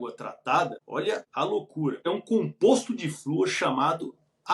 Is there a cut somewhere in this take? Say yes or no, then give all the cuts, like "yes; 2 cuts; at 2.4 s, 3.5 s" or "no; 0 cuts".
yes; 2 cuts; at 1.0 s, 2.1 s